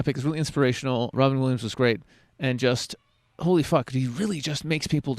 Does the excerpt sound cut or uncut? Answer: cut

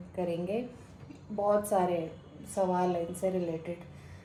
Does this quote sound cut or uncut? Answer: uncut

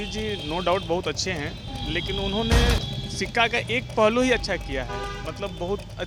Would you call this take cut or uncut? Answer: uncut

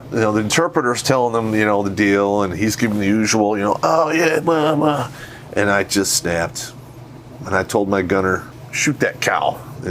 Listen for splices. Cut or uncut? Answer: cut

